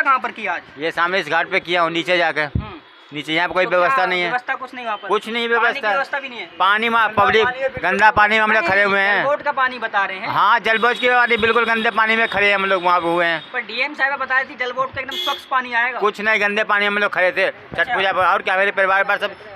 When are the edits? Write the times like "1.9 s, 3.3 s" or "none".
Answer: none